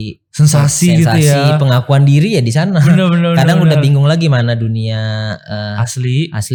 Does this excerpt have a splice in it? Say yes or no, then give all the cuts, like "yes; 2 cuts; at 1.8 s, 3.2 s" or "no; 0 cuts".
no; 0 cuts